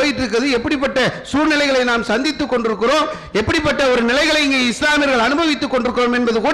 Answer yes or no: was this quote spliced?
no